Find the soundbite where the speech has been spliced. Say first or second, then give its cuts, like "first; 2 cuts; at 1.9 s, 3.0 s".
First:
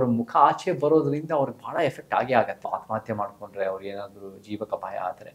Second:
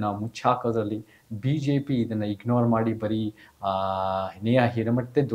first; 1 cut; at 2.6 s